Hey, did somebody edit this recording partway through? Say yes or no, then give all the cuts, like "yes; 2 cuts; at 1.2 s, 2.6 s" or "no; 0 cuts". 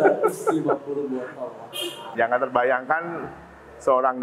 yes; 1 cut; at 2.0 s